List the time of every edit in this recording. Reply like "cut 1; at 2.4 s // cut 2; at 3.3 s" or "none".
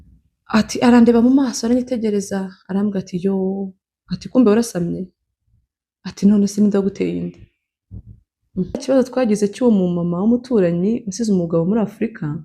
cut 1; at 8.8 s